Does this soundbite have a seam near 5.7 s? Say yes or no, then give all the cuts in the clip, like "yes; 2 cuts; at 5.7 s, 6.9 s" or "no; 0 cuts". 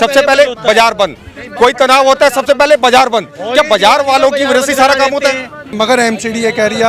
yes; 1 cut; at 5.7 s